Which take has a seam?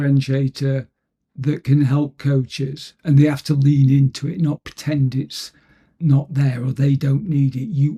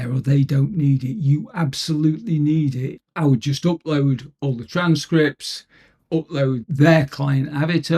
second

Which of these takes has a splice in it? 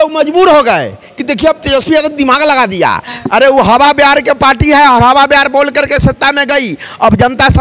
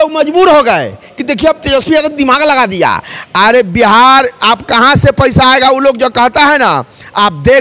first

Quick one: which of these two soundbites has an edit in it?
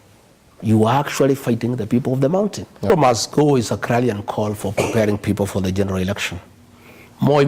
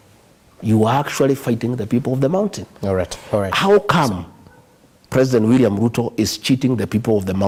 first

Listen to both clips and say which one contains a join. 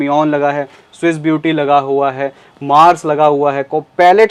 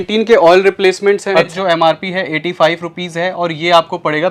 second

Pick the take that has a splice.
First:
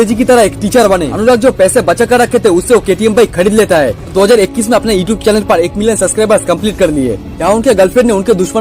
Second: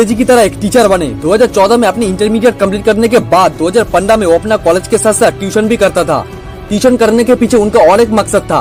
first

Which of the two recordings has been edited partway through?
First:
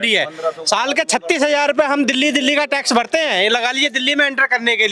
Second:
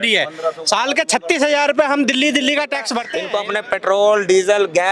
second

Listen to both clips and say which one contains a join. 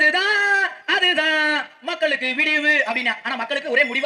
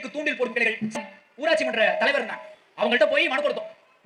second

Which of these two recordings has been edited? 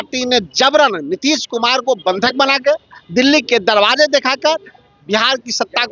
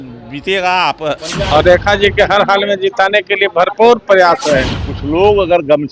second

